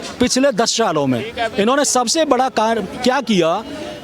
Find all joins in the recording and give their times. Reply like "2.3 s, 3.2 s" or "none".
none